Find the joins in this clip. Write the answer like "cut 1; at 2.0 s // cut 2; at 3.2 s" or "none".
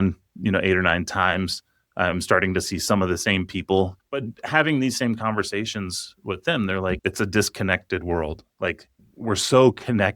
cut 1; at 4.0 s // cut 2; at 7.0 s